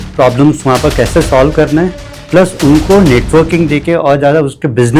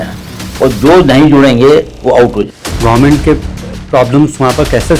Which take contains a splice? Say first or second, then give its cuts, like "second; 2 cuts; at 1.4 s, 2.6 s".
second; 1 cut; at 2.6 s